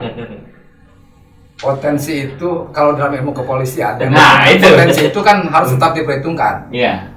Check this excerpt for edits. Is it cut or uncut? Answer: uncut